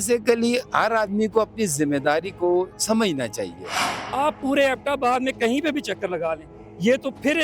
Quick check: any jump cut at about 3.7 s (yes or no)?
yes